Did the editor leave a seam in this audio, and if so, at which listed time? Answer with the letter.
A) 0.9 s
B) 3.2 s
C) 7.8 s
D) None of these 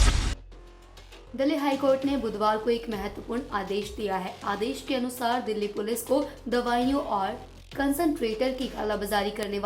A